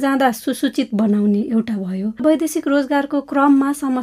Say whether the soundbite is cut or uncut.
cut